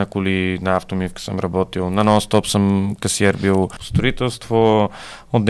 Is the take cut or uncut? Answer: cut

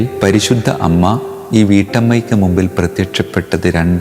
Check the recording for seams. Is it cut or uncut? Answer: uncut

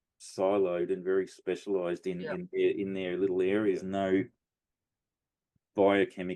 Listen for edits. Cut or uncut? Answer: cut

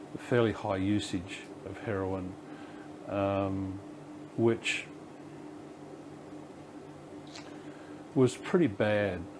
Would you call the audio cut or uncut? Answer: uncut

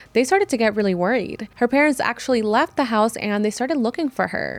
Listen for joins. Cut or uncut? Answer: cut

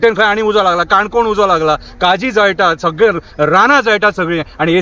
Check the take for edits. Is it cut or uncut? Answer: uncut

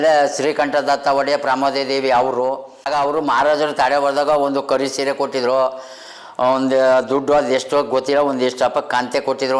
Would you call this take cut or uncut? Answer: cut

